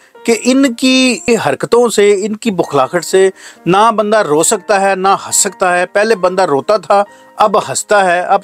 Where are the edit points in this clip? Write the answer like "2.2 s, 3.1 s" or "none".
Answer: 1.3 s